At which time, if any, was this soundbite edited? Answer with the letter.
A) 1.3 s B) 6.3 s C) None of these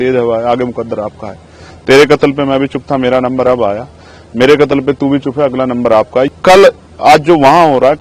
B